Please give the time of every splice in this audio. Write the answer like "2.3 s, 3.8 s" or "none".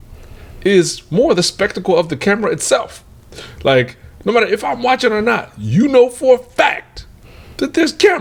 none